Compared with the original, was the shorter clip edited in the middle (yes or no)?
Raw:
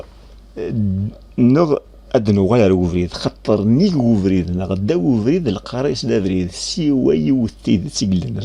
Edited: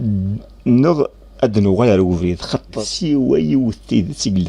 yes